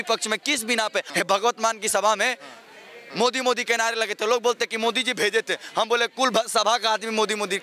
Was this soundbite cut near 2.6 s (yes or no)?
no